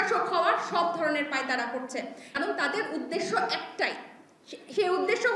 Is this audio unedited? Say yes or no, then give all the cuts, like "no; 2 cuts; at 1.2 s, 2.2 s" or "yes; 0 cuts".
no; 1 cut; at 2.3 s